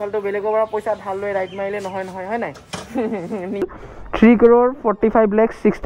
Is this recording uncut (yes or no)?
no